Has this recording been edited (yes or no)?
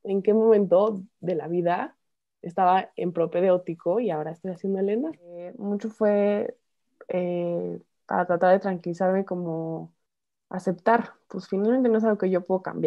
yes